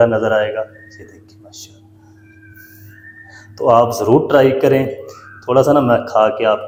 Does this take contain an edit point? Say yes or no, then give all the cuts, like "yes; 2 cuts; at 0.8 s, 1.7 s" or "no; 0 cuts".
no; 0 cuts